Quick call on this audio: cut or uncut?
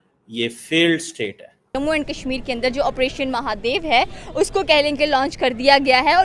cut